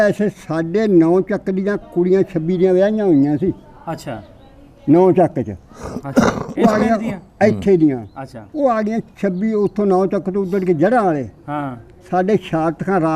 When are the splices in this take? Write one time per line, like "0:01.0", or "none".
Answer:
none